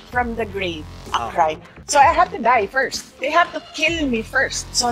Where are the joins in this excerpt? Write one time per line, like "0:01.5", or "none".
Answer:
0:01.8

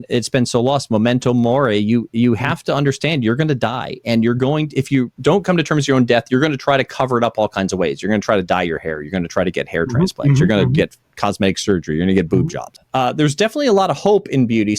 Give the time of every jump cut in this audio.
0:05.1
0:12.7

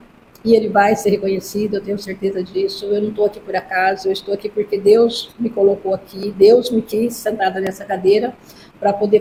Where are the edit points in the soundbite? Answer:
none

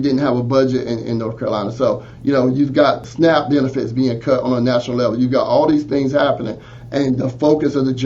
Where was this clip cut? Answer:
0:03.0

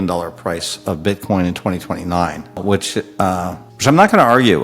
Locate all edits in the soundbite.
0:02.6
0:03.7

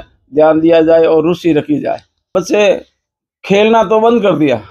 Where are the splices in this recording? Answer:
0:02.3

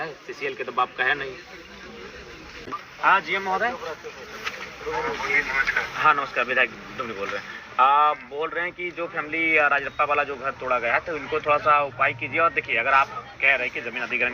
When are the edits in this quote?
0:02.7

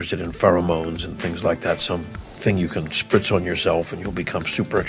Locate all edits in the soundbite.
none

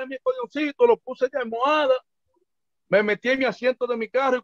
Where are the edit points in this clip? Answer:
none

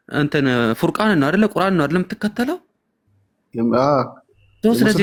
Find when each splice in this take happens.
none

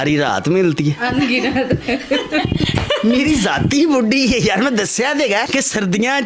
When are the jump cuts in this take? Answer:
none

